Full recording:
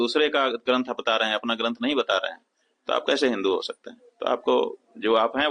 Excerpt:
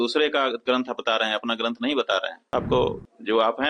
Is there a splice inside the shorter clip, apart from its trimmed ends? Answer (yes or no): yes